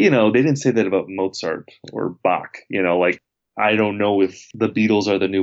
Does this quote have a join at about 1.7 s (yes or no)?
no